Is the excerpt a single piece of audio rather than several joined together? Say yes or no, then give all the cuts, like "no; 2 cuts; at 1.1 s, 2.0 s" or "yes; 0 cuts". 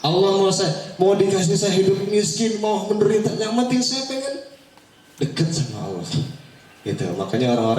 yes; 0 cuts